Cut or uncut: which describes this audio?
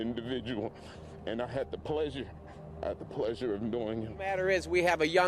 cut